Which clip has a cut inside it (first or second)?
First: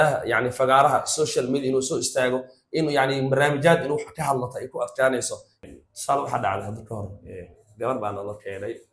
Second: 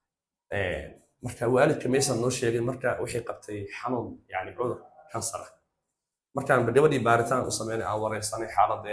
first